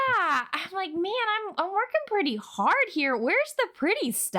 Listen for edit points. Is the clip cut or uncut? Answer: uncut